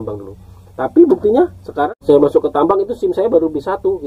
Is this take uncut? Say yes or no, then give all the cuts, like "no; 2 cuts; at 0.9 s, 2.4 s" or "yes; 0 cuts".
no; 1 cut; at 1.9 s